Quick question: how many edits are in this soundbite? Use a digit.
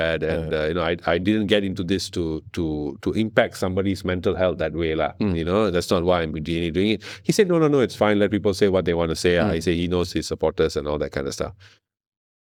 0